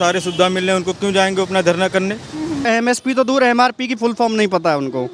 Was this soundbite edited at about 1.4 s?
no; 1 cut; at 2.7 s

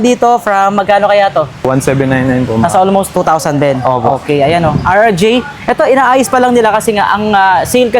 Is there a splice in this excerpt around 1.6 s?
yes; 2 cuts; at 1.6 s, 3.1 s

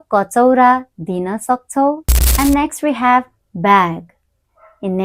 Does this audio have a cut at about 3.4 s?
no; 1 cut; at 2.2 s

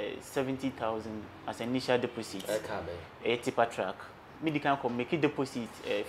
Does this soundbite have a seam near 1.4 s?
no; 1 cut; at 4.4 s

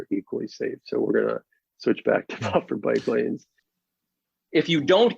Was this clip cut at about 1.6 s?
no; 1 cut; at 3.8 s

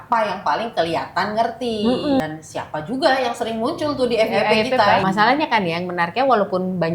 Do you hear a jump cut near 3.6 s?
no; 2 cuts; at 2.2 s, 5.0 s

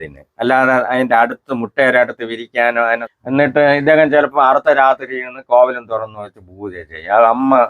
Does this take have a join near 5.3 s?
no; 1 cut; at 3.1 s

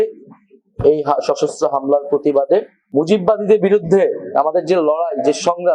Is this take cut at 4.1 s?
no; 1 cut; at 2.8 s

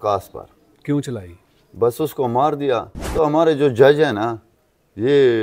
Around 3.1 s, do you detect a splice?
yes; 1 cut; at 3.1 s

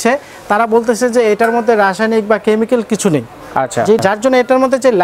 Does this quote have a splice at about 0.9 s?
no; 1 cut; at 4.0 s

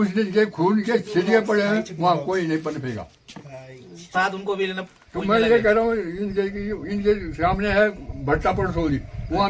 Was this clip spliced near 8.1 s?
no; 1 cut; at 4.1 s

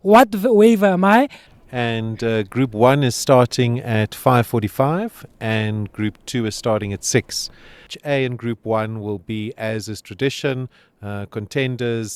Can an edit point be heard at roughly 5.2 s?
no; 2 cuts; at 1.5 s, 8.0 s

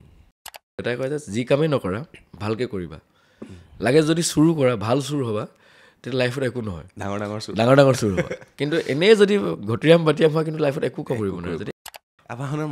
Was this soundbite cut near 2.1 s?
no; 2 cuts; at 0.8 s, 11.7 s

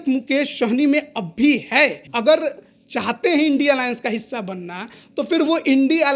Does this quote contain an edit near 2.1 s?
yes; 1 cut; at 2.1 s

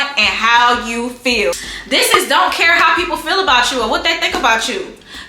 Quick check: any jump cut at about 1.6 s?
yes; 1 cut; at 1.6 s

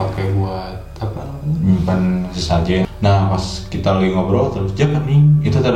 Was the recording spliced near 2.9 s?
yes; 1 cut; at 2.9 s

